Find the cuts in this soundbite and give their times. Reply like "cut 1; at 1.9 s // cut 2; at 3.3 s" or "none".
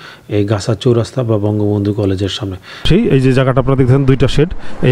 cut 1; at 2.9 s

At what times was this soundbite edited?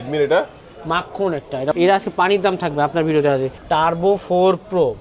cut 1; at 1.8 s // cut 2; at 3.5 s

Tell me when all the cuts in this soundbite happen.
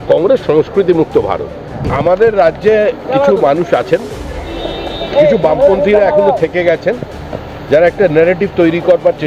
cut 1; at 1.9 s

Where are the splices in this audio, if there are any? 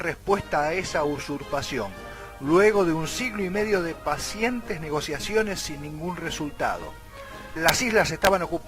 none

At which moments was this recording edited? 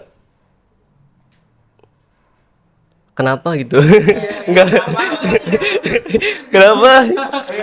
none

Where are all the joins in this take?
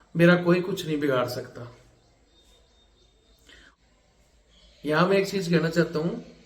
cut 1; at 3.7 s

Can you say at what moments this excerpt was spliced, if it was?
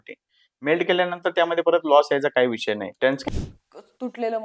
cut 1; at 3.2 s

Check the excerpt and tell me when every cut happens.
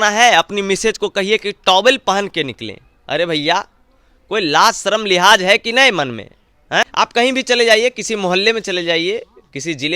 cut 1; at 6.9 s

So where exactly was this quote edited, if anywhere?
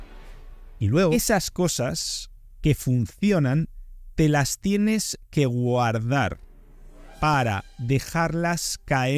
cut 1; at 1.1 s

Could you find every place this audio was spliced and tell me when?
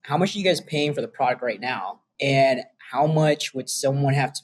cut 1; at 2.0 s

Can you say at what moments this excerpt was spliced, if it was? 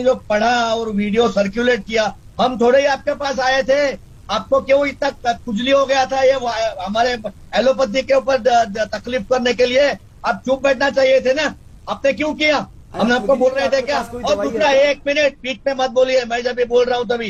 none

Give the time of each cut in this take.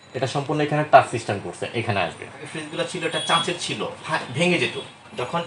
cut 1; at 2.6 s

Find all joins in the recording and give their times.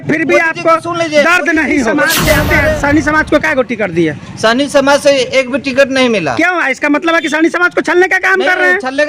cut 1; at 2.5 s

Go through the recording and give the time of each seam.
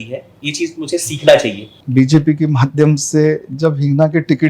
cut 1; at 1.8 s

